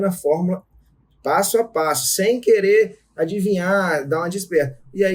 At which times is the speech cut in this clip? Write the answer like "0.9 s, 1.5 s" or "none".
none